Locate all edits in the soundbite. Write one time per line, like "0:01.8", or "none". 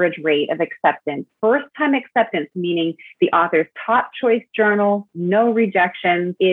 none